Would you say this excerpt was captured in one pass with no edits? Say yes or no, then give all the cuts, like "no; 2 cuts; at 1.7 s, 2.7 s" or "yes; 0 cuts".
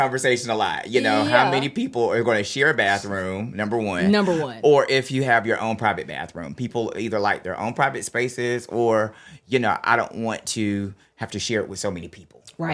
yes; 0 cuts